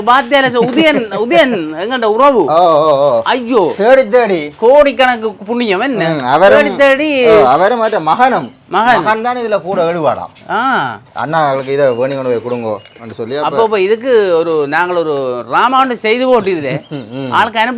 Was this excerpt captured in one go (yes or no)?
yes